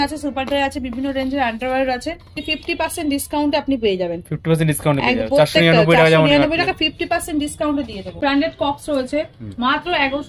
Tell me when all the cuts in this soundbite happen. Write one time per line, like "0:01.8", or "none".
0:02.4
0:08.1